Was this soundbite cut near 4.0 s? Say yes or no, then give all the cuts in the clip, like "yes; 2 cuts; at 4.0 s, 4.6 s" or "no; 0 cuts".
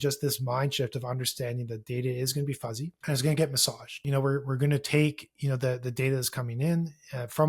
yes; 2 cuts; at 3.0 s, 4.0 s